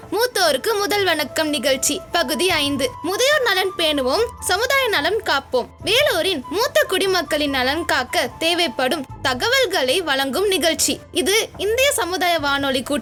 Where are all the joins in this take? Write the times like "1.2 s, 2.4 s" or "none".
none